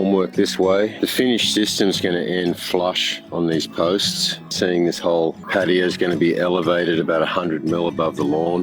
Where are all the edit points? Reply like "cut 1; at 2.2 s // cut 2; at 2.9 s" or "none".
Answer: cut 1; at 0.9 s // cut 2; at 4.5 s